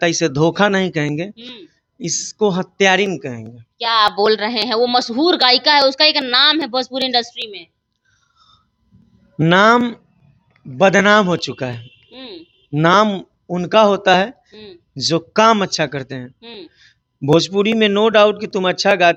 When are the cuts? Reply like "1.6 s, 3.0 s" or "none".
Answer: none